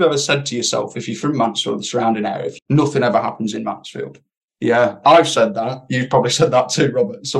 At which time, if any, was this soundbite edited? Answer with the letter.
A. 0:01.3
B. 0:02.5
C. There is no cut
B